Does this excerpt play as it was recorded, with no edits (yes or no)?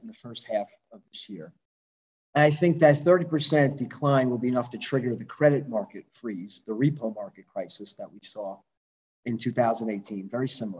yes